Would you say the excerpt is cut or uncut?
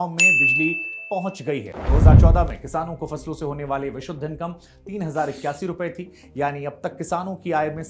cut